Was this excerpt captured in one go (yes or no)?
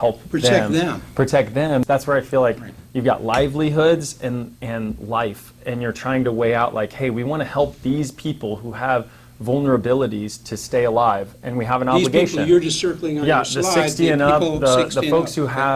no